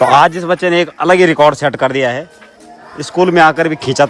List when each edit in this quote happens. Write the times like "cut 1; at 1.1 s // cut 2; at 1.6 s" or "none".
none

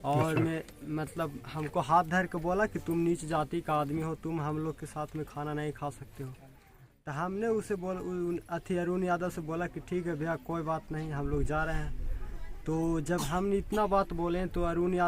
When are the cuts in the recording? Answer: none

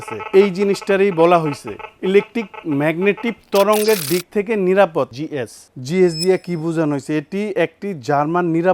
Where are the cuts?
cut 1; at 5.1 s

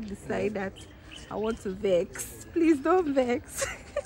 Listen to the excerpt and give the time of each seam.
none

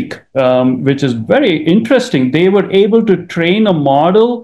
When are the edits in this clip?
none

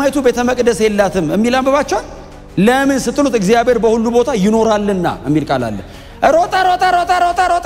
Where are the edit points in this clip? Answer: none

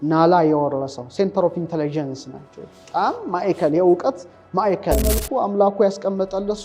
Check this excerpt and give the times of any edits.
cut 1; at 5.1 s

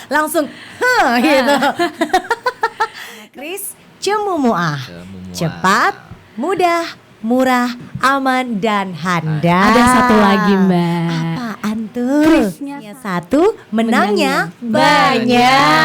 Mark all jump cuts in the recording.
cut 1; at 3.4 s // cut 2; at 12.8 s

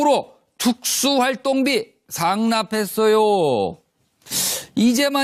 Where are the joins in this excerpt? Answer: cut 1; at 2.4 s

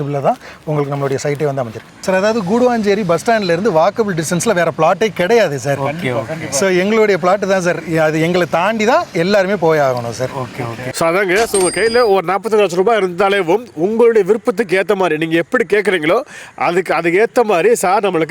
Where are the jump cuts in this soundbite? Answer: cut 1; at 1.8 s // cut 2; at 10.8 s

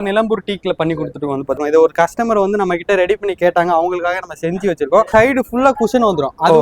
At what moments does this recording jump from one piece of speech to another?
cut 1; at 1.6 s // cut 2; at 5.1 s

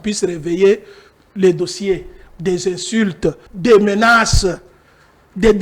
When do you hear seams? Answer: cut 1; at 3.5 s

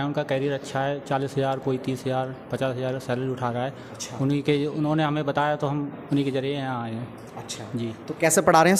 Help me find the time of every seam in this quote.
none

